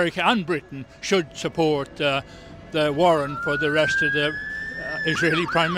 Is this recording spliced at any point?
no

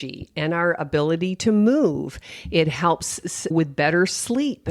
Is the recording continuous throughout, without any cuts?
no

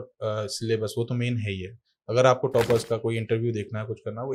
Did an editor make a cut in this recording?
no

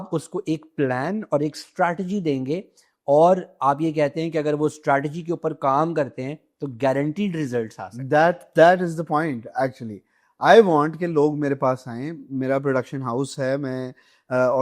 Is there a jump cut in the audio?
no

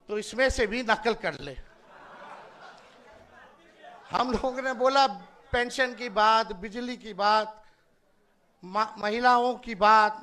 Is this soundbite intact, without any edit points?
yes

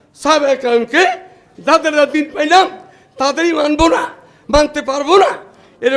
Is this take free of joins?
yes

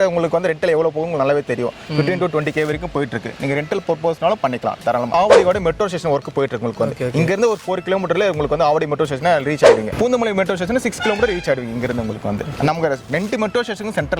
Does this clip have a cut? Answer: yes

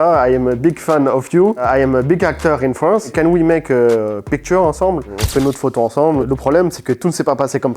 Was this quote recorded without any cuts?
no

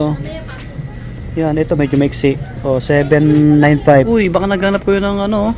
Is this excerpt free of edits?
no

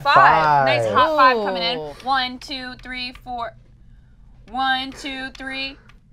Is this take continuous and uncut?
yes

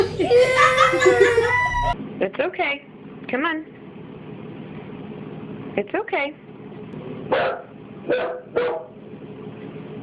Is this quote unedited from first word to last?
no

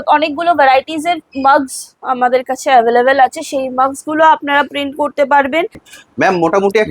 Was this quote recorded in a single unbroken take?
no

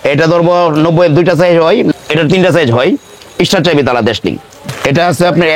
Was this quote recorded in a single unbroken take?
no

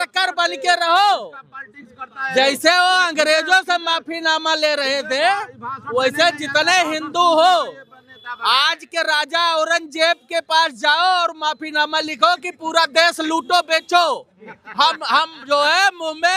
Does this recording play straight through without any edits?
yes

